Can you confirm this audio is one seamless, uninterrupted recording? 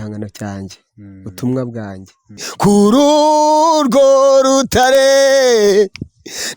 no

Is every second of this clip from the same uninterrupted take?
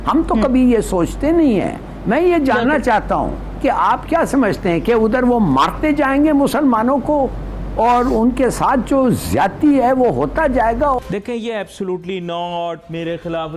no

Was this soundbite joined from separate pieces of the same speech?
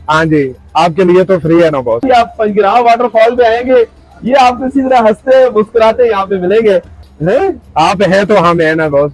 yes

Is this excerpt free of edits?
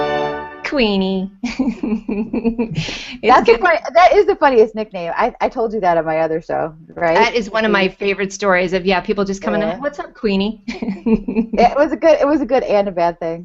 no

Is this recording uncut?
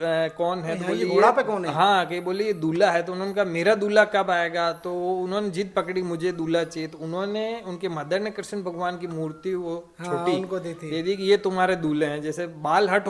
yes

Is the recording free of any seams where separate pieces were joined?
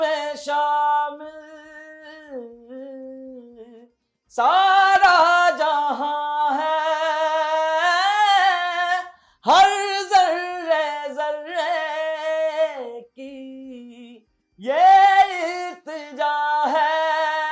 yes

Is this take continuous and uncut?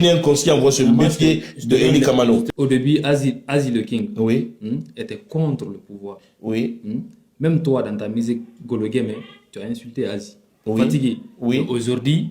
no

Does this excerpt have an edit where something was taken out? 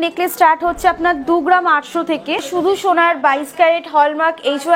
yes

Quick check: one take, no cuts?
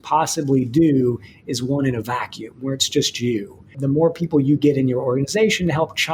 no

